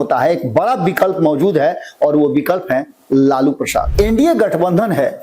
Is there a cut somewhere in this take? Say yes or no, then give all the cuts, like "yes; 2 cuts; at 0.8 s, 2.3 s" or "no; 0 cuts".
yes; 1 cut; at 3.9 s